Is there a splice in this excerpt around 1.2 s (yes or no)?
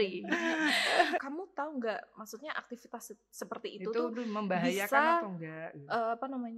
yes